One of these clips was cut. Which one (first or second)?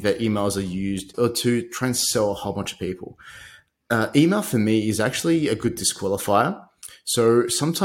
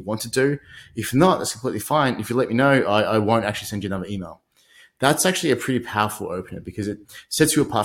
first